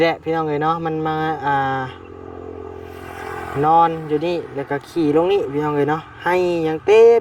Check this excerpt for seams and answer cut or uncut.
uncut